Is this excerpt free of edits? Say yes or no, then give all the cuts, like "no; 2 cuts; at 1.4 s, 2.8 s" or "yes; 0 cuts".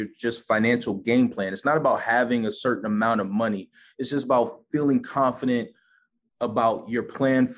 yes; 0 cuts